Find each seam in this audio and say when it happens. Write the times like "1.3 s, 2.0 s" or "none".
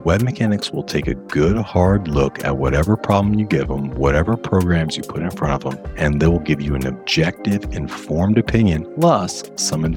5.8 s, 8.9 s